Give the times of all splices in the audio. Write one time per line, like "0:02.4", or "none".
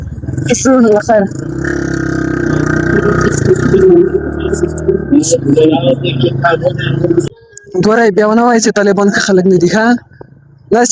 0:07.3